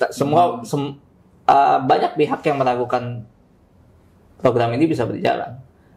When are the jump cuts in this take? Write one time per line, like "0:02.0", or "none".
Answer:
none